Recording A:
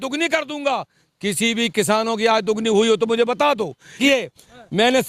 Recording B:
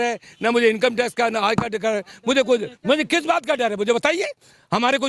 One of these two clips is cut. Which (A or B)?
A